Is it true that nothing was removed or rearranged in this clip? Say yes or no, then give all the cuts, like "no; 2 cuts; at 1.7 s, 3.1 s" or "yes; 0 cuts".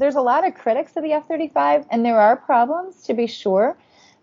yes; 0 cuts